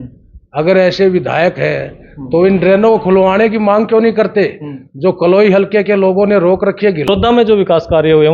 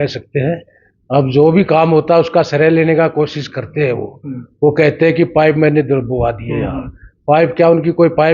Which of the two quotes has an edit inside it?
first; 1 cut; at 7.1 s

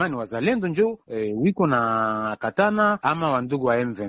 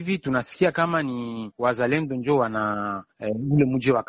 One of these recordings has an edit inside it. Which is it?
first; 1 cut; at 3.0 s

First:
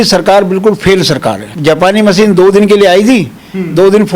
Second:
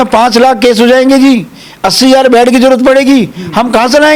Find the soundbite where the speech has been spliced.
first; 1 cut; at 1.5 s

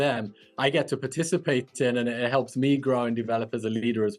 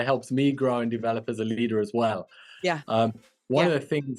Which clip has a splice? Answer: second; 1 cut; at 3.3 s

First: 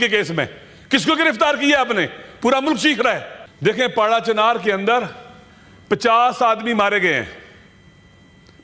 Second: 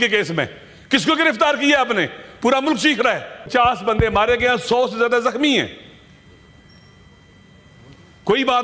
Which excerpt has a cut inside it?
second; 1 cut; at 3.4 s

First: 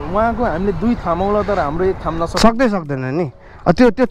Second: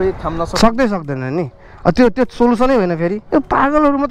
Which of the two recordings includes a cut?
second; 1 cut; at 3.2 s

